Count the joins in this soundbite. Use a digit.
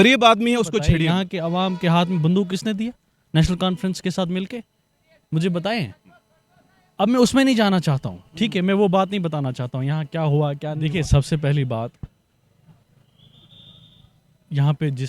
2